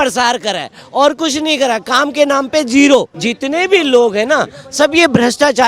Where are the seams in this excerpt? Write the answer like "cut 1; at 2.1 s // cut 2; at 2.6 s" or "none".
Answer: cut 1; at 3.2 s

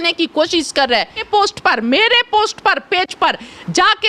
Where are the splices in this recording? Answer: cut 1; at 1.2 s

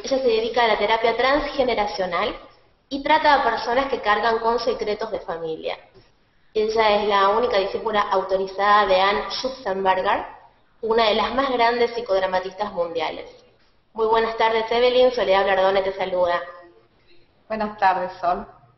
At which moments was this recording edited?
none

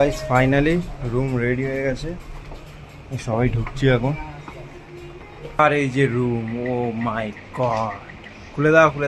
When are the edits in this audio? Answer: cut 1; at 5.6 s

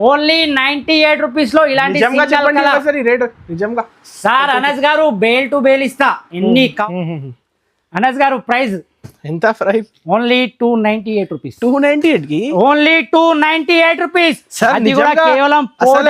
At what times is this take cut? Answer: cut 1; at 6.8 s

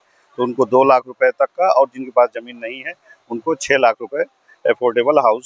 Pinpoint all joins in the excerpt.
none

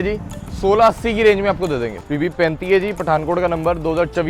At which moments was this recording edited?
cut 1; at 2.0 s

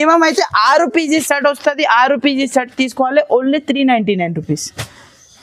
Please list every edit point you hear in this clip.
none

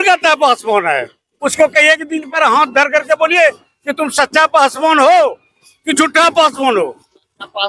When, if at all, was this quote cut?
cut 1; at 1.4 s

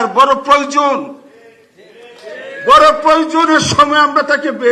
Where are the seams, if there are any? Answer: none

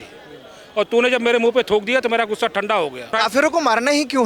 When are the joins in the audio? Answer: cut 1; at 3.1 s

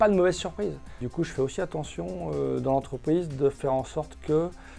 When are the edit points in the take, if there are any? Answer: cut 1; at 1.0 s

